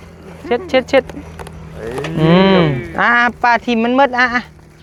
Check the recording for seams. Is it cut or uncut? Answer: uncut